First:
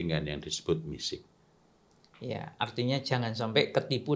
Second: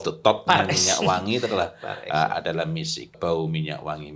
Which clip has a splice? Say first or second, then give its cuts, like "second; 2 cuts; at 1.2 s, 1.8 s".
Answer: second; 1 cut; at 3.2 s